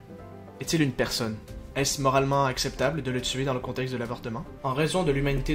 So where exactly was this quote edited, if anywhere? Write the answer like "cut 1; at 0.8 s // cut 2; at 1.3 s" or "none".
cut 1; at 4.6 s